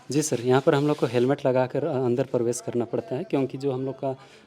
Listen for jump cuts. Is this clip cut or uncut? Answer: uncut